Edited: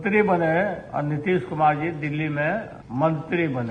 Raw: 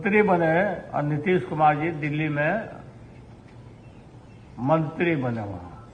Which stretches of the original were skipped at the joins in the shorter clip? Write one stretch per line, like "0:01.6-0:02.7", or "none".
0:02.8-0:04.5